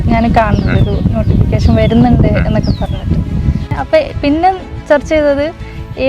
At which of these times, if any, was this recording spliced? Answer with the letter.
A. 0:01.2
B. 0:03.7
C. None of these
B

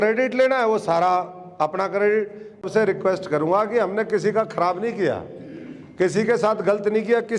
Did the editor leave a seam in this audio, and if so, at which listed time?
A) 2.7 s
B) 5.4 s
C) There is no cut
A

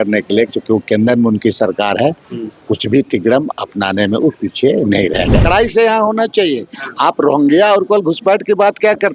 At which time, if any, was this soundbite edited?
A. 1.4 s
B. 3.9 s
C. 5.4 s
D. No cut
C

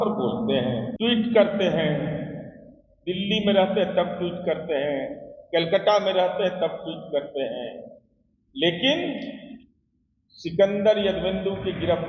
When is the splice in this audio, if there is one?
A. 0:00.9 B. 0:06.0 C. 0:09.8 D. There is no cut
A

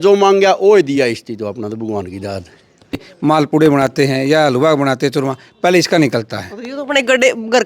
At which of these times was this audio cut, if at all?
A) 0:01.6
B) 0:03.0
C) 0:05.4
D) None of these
B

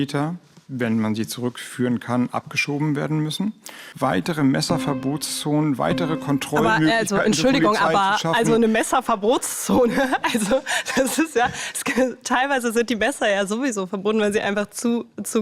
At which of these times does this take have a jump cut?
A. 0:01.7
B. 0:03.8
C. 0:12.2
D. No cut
B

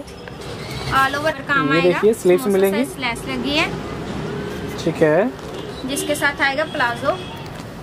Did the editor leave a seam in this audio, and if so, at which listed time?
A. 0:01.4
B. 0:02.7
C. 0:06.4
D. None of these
A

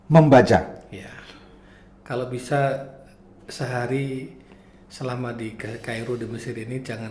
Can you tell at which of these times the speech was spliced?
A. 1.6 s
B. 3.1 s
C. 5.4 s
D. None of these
D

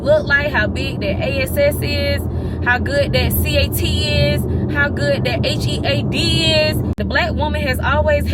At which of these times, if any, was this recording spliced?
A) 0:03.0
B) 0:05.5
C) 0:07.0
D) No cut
C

